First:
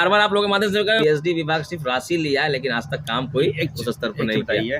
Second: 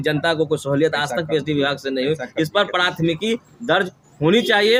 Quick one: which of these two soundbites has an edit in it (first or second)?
first